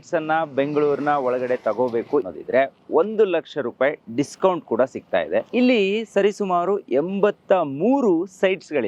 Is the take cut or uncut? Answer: cut